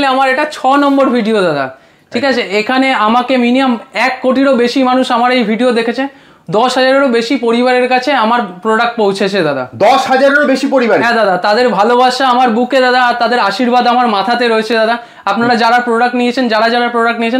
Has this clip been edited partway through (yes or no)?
no